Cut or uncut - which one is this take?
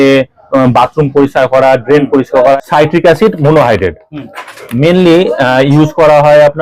cut